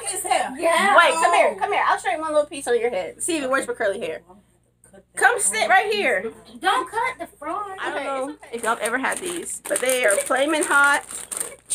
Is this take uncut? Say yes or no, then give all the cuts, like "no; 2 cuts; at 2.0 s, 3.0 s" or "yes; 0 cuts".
no; 1 cut; at 7.8 s